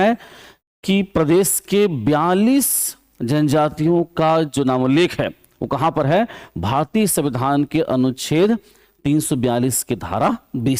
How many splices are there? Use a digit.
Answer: 0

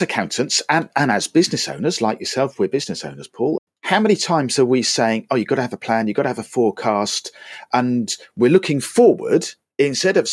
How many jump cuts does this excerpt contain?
1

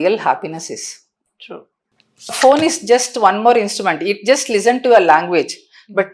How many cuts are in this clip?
1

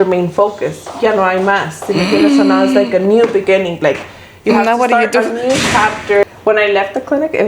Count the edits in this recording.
1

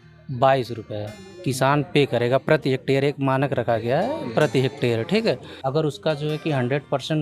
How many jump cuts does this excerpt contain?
1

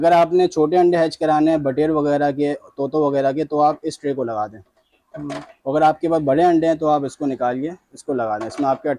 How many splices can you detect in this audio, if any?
0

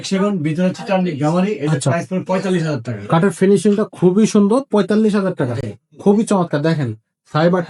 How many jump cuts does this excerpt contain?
0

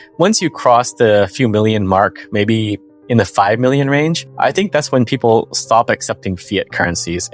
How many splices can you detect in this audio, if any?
1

